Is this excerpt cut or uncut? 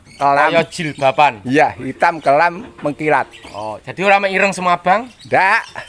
uncut